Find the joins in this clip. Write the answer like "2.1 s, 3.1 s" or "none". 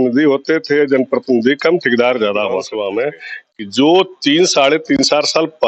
2.7 s

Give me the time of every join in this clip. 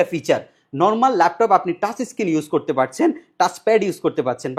none

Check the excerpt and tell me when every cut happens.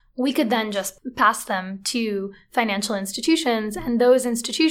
0.9 s

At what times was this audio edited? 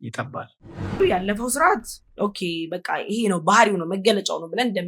1.0 s

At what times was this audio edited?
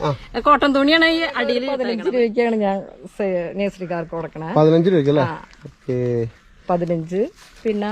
1.7 s

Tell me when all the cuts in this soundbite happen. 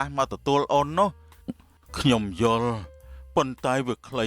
1.7 s

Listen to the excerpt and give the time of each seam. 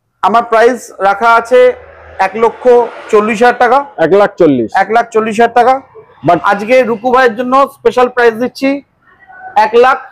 none

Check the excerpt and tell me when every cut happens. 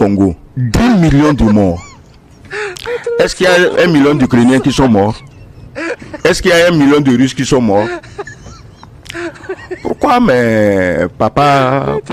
none

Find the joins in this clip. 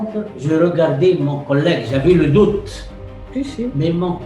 none

